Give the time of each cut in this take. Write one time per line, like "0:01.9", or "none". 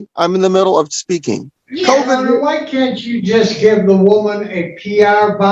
0:01.5